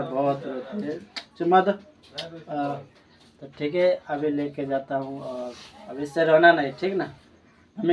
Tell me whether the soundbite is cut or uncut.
uncut